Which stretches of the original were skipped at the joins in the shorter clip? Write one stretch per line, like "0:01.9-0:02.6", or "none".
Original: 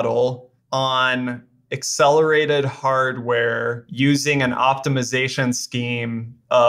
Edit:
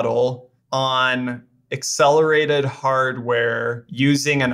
none